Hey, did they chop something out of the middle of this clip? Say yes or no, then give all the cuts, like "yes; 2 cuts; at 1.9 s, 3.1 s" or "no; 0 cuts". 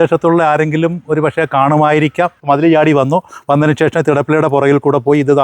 yes; 1 cut; at 2.4 s